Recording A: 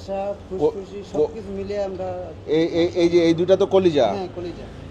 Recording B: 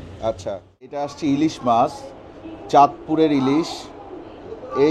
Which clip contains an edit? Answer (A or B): B